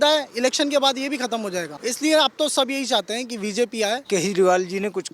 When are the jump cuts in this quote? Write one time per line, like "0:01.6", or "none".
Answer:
0:01.8
0:04.0